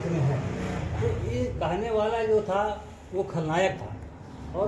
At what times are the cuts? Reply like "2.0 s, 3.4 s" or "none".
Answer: none